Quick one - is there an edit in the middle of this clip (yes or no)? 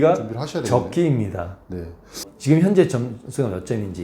yes